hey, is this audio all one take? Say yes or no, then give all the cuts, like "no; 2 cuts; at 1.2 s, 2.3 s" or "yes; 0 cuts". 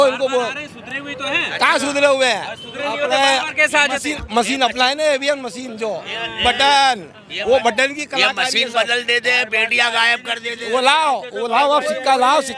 yes; 0 cuts